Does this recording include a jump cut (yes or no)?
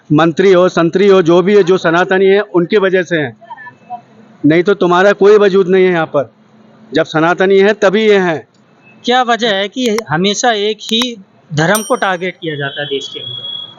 no